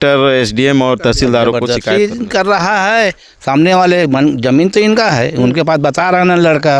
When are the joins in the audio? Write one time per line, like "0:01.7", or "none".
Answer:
0:01.6